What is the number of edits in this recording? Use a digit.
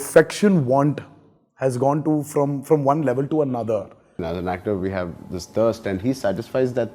1